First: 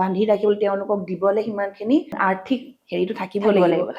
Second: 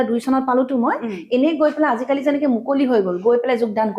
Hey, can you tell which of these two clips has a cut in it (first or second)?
first